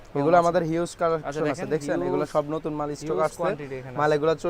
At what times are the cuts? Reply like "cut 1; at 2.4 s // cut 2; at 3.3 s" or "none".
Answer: none